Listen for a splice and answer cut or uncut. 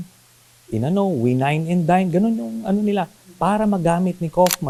uncut